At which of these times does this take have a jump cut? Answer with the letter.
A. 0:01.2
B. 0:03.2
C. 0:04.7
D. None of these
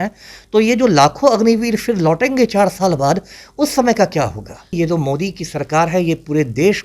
C